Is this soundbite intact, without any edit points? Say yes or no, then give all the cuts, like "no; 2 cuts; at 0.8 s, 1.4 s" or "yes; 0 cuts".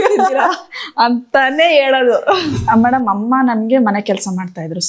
no; 1 cut; at 2.5 s